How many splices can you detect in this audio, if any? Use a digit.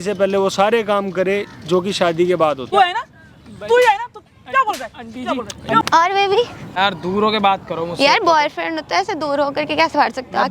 3